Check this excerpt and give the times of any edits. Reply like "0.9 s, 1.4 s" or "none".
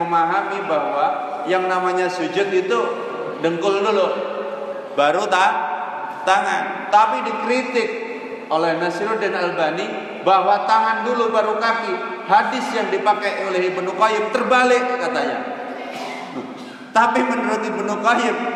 none